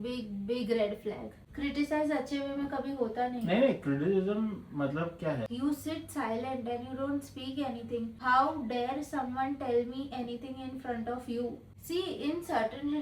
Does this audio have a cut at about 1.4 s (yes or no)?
yes